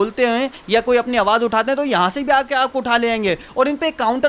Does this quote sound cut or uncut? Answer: uncut